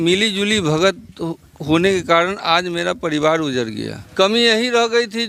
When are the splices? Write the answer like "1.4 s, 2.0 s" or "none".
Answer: 4.0 s